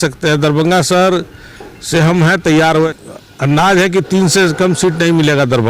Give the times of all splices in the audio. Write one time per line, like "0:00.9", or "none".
0:02.9

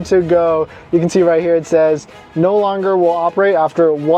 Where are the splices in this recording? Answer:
none

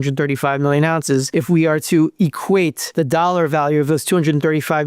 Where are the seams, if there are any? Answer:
0:01.3
0:02.8

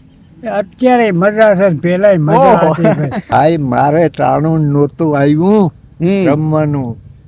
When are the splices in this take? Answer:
0:03.1

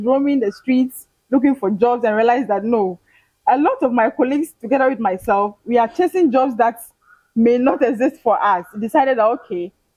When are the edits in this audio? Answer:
none

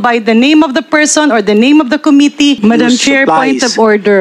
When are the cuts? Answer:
0:02.6

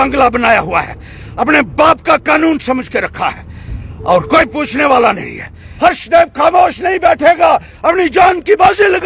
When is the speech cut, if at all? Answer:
0:05.6

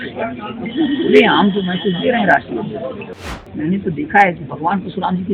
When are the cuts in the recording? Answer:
0:03.2

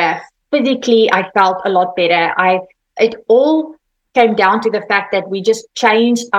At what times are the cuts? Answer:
0:02.8

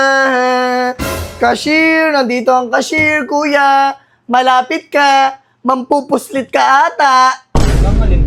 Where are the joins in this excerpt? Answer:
none

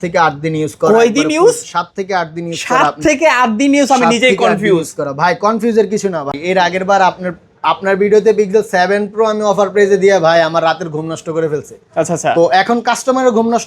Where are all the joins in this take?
0:06.3

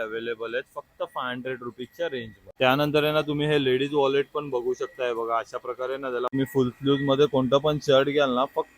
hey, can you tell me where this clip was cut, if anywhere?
0:02.4
0:06.3

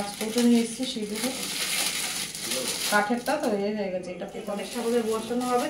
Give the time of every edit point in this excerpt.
0:04.7

